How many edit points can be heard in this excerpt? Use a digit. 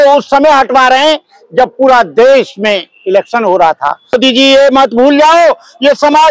1